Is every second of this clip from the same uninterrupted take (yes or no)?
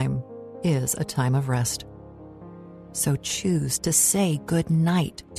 yes